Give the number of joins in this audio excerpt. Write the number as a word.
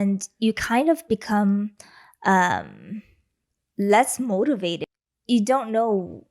one